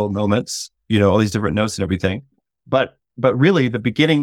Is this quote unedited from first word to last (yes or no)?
yes